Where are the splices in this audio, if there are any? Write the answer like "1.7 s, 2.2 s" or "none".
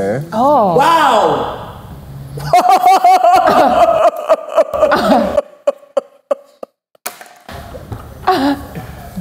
none